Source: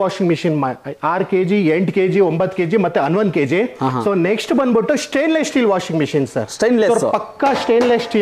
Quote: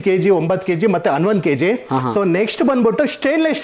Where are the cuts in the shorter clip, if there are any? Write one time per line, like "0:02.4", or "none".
none